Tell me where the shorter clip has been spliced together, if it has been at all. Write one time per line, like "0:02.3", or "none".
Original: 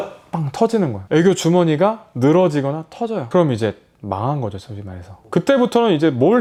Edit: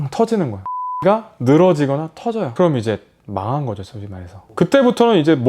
0:01.0